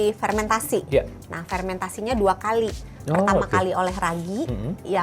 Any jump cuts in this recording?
no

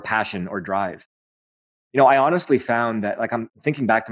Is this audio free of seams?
no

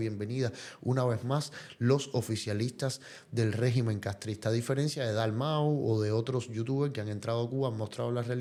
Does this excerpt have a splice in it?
no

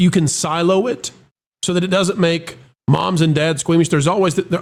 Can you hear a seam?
no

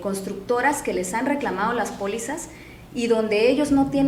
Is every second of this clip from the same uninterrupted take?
yes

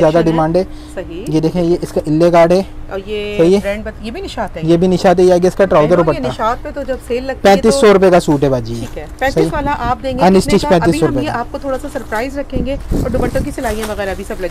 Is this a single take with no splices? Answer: yes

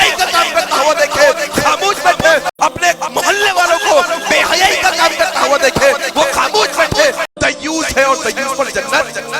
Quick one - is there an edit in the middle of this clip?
no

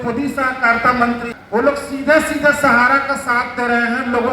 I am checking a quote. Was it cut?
yes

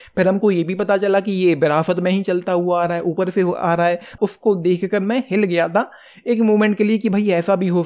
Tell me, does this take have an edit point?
yes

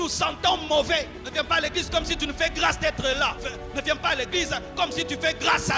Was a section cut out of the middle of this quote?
yes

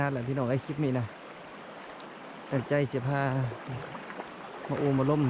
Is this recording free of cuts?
yes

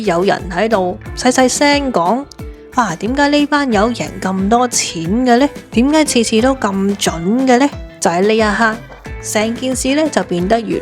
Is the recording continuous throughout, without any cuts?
yes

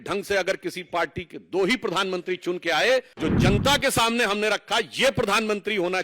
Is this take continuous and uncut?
no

